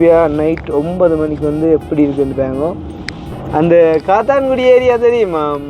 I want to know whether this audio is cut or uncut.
cut